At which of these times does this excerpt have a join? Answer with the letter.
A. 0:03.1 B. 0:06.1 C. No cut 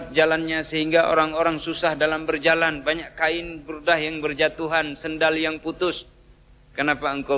C